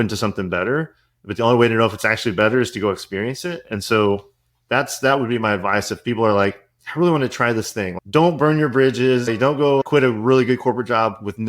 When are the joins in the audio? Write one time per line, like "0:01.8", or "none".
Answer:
0:08.0
0:09.7